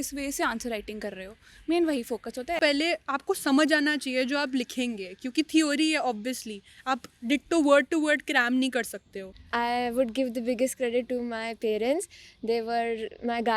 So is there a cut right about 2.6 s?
yes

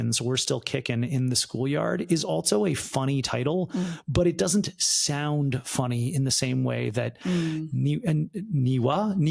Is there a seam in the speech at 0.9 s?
no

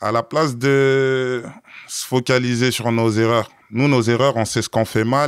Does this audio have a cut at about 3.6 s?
no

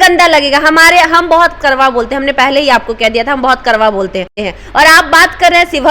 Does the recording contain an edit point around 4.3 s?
yes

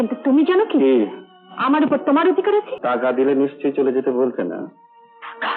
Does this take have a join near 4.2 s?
no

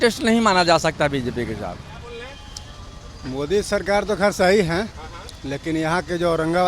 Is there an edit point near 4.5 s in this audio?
no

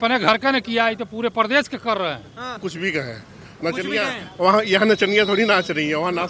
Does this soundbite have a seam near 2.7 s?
yes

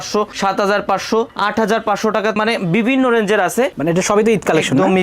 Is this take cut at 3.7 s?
yes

